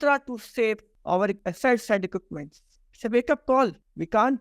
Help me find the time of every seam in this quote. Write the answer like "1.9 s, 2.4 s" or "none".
1.3 s